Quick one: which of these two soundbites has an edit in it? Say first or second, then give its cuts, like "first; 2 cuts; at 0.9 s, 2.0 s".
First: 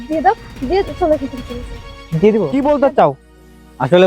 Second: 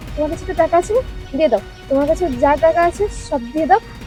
first; 1 cut; at 2.6 s